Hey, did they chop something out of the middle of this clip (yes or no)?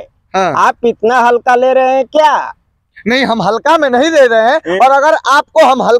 no